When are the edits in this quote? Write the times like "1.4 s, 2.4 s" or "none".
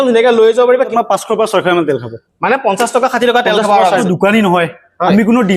0.9 s, 4.0 s